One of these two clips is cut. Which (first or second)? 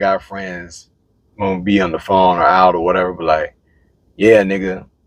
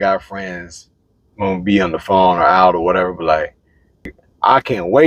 second